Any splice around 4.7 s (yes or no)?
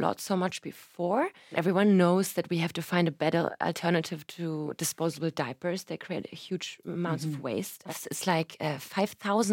yes